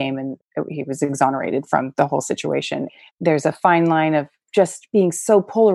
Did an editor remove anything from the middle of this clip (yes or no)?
yes